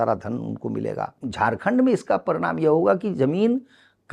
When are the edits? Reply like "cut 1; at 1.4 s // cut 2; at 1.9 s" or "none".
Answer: cut 1; at 1.2 s